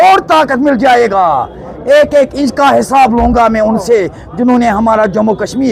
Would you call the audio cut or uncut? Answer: uncut